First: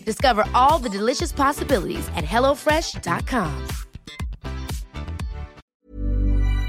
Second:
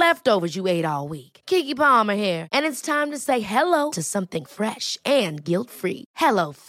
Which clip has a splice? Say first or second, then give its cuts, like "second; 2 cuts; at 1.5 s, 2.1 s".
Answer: first; 1 cut; at 5.6 s